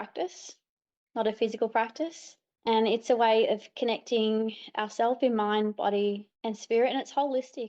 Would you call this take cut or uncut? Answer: uncut